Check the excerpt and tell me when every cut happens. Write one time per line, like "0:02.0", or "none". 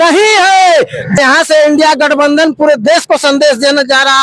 0:01.2